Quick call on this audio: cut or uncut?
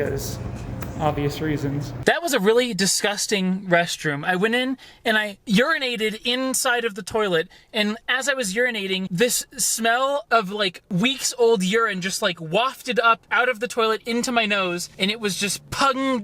cut